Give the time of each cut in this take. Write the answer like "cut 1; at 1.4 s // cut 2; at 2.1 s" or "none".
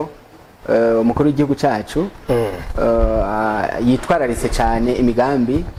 none